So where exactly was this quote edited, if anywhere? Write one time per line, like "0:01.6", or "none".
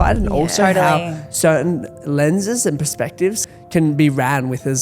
0:03.4